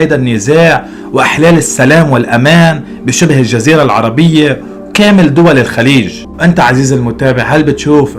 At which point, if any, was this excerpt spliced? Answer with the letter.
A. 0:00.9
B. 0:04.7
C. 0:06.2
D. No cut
C